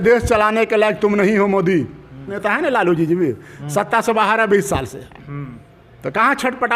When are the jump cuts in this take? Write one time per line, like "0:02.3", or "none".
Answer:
0:02.4